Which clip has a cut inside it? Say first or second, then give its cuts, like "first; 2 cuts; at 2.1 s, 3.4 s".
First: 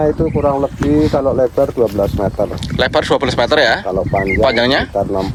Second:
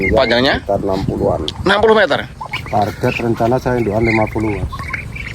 second; 1 cut; at 2.5 s